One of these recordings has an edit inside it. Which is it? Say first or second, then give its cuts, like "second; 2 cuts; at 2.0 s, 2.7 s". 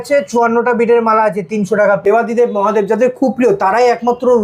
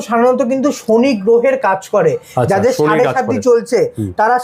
first; 1 cut; at 2.0 s